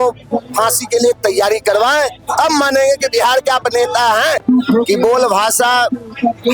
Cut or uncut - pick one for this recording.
cut